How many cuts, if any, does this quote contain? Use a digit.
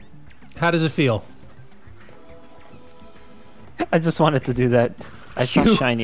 1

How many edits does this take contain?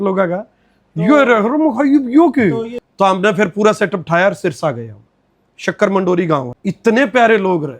2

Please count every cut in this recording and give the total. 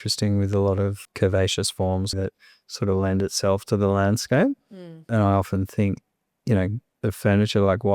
3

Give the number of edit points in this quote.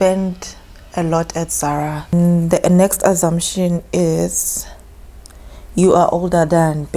1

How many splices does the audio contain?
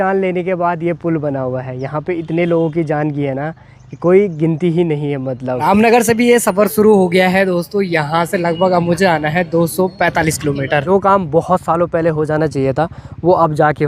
2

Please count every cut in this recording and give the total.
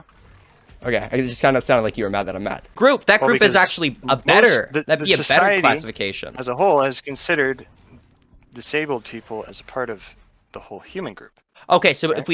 1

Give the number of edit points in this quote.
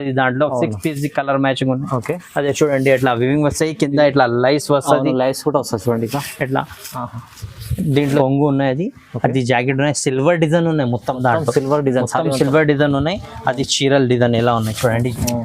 1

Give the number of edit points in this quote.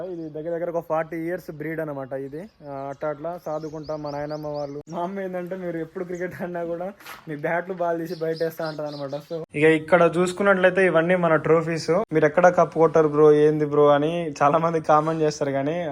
3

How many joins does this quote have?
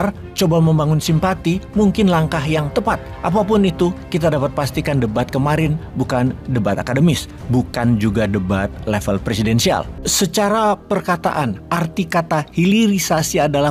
1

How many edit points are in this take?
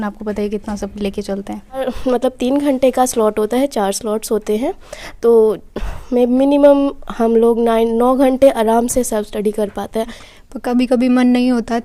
2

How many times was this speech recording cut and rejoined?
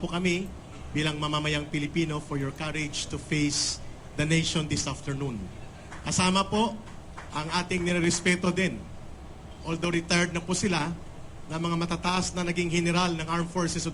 0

